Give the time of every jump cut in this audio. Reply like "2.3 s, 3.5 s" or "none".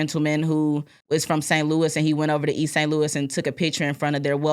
0.9 s

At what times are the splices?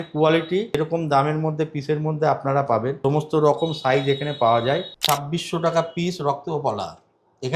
0.8 s, 3.0 s, 4.9 s

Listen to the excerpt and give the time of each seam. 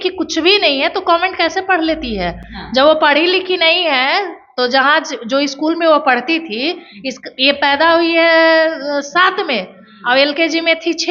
none

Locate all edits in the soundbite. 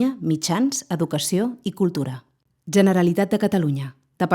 2.2 s

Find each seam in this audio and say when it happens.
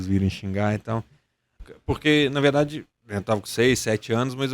1.5 s

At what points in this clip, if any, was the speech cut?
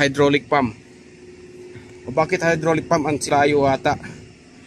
3.3 s

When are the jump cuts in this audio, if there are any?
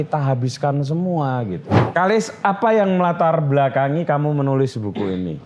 1.7 s

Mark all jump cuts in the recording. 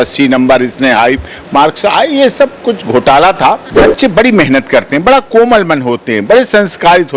3.9 s

